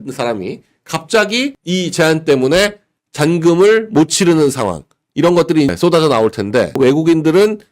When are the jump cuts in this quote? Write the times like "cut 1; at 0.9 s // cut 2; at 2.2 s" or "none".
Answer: cut 1; at 6.7 s